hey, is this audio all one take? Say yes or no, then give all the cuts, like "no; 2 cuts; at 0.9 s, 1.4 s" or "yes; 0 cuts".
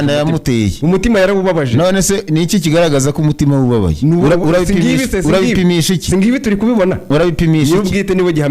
yes; 0 cuts